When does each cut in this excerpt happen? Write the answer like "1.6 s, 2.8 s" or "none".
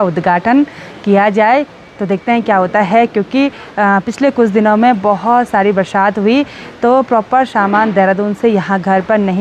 none